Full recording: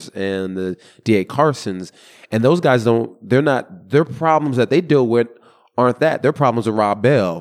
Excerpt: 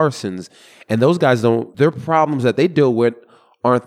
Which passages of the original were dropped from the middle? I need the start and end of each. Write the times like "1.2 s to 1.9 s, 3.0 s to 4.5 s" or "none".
3.1 s to 3.8 s